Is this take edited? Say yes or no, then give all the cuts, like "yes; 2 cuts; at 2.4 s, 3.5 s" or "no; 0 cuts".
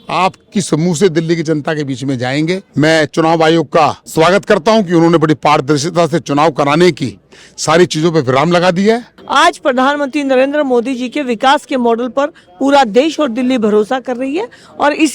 yes; 3 cuts; at 2.6 s, 4.0 s, 9.2 s